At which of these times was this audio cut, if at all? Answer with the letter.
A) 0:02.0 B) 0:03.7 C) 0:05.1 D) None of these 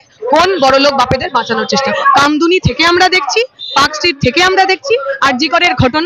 A